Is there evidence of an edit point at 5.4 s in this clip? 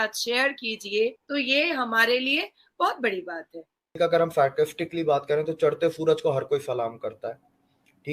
no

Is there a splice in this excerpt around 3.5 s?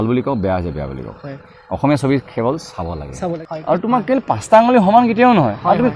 yes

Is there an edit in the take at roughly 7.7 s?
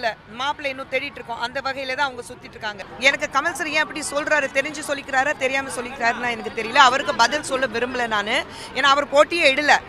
no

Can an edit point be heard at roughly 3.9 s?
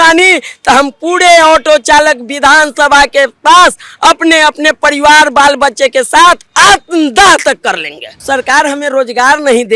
no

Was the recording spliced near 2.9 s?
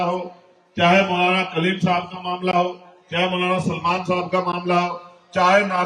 no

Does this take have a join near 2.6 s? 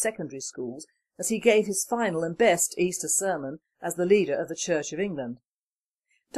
yes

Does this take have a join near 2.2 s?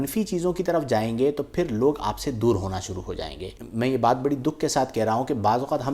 no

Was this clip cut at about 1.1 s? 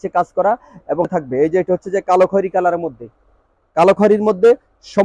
yes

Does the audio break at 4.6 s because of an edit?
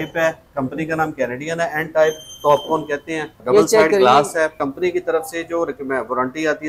yes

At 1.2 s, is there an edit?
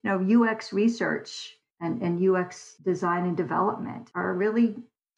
no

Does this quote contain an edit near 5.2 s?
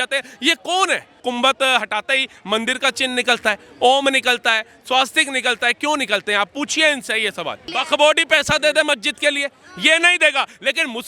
no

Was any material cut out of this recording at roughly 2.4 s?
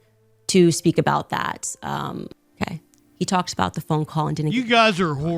yes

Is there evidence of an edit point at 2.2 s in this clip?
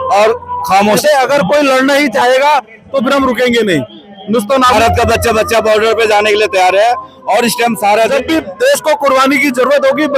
no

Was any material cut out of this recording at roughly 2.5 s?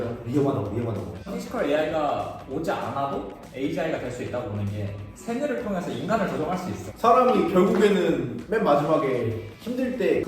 no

